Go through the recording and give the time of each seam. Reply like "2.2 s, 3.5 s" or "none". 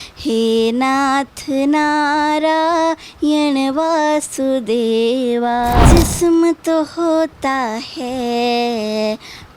5.9 s